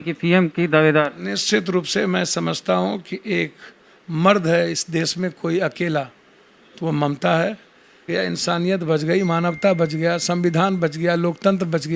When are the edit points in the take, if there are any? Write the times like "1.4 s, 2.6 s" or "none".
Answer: 8.0 s